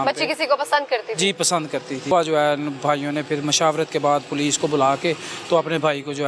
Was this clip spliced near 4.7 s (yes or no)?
no